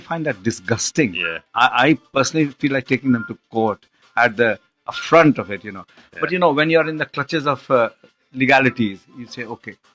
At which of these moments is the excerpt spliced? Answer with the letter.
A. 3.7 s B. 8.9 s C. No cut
B